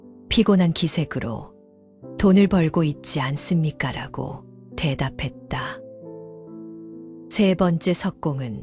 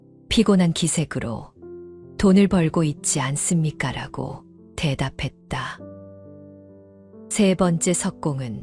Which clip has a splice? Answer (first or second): second